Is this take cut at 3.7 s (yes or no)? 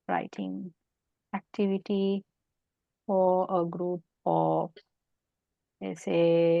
no